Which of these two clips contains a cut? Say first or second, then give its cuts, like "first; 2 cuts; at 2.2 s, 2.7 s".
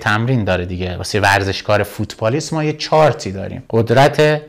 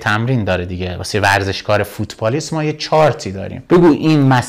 second; 1 cut; at 3.5 s